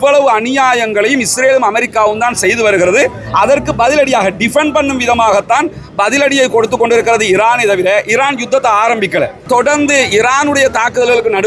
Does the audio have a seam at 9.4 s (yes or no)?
yes